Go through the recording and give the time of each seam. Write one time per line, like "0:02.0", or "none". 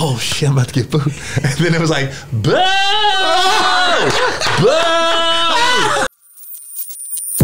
0:06.1